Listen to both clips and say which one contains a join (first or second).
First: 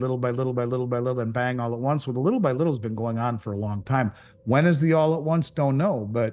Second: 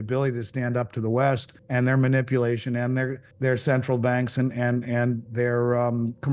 second